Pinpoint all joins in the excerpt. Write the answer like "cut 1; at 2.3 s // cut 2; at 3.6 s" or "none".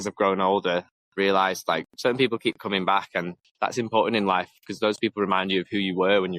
cut 1; at 1.0 s // cut 2; at 1.9 s // cut 3; at 3.4 s